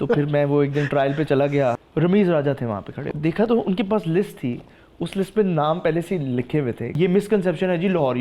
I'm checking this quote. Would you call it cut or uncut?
cut